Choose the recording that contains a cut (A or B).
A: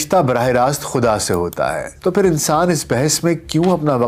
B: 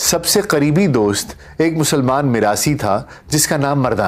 A